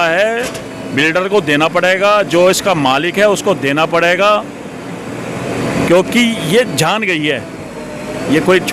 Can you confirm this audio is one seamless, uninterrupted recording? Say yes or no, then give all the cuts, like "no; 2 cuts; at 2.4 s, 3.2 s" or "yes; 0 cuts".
yes; 0 cuts